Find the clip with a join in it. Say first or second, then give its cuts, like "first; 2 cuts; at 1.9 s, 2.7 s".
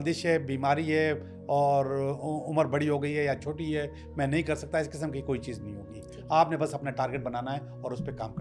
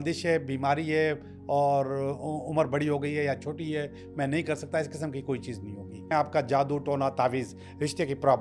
second; 1 cut; at 6.1 s